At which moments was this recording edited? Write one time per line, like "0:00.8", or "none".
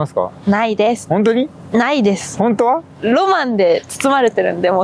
0:01.0